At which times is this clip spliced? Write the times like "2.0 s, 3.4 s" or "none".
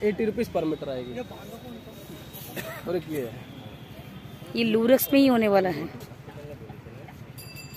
none